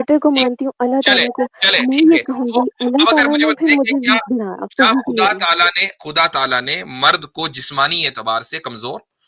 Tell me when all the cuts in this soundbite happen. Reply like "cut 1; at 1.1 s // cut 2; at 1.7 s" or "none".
none